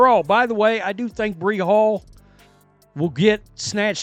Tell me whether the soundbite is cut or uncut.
uncut